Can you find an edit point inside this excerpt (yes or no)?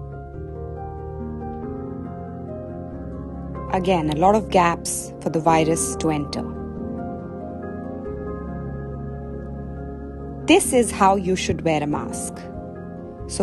yes